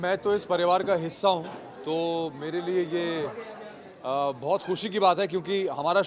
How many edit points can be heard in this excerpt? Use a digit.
0